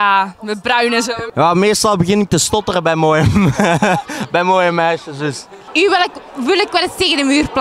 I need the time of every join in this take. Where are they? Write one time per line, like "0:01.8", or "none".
0:01.3
0:05.6